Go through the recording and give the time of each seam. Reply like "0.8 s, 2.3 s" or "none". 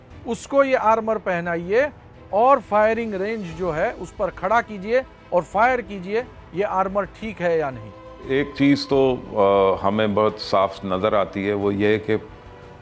8.1 s